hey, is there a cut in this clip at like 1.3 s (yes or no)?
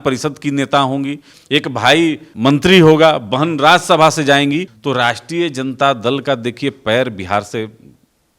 yes